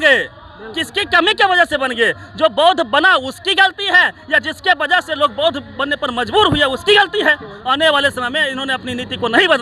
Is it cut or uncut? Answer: cut